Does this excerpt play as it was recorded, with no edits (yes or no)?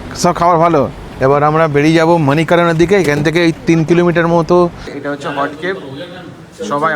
no